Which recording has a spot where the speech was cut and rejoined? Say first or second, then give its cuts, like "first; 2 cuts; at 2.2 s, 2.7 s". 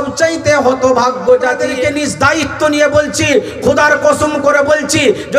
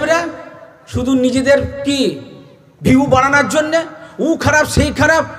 first; 1 cut; at 1.7 s